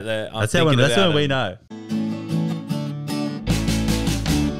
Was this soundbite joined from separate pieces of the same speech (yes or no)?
yes